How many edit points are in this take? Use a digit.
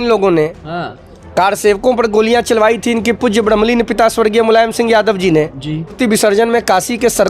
1